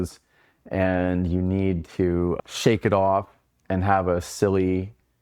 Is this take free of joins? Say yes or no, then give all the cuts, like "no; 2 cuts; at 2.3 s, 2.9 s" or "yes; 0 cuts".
no; 1 cut; at 2.4 s